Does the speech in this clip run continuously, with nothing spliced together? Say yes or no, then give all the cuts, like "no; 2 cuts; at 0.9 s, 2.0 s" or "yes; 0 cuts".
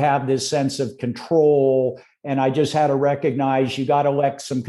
yes; 0 cuts